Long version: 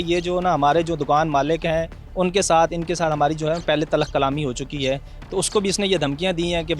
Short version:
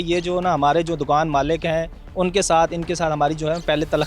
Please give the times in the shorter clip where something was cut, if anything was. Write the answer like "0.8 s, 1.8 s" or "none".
none